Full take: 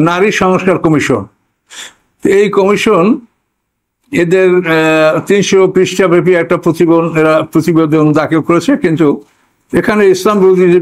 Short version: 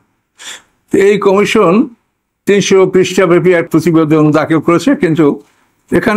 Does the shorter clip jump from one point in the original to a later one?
yes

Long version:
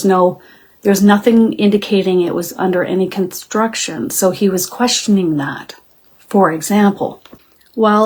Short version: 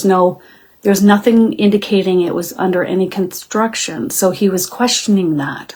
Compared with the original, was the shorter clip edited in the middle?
no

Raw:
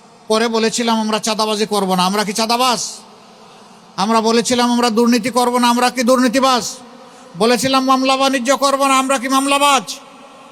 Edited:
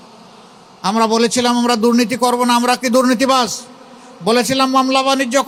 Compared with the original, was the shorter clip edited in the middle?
no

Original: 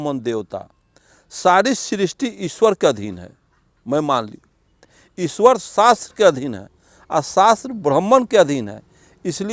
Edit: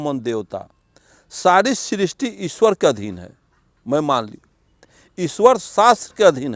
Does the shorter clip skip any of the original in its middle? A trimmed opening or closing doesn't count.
no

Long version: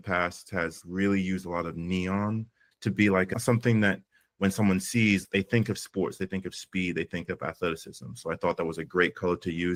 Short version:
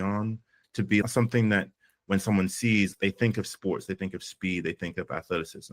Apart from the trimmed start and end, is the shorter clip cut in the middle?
yes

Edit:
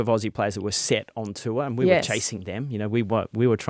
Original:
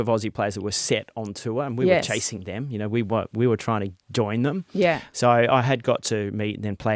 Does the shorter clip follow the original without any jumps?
yes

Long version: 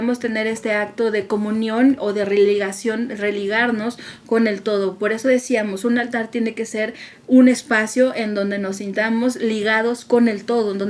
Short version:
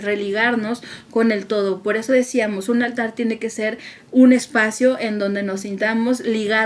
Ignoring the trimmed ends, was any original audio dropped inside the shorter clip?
no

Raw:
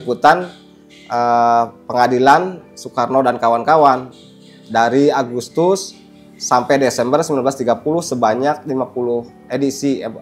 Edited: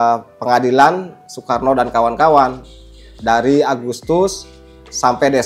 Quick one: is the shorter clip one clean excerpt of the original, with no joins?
yes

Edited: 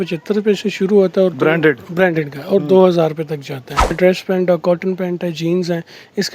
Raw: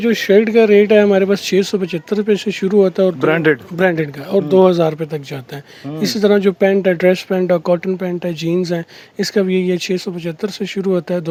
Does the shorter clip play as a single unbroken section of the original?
no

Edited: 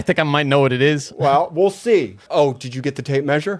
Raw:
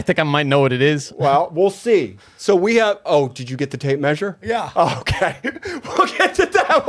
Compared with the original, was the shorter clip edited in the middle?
yes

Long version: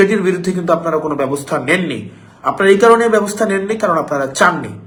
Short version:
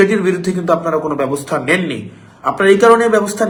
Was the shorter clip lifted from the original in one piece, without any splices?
yes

